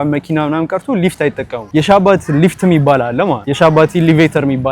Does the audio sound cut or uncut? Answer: cut